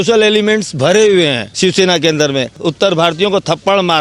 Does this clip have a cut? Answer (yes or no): yes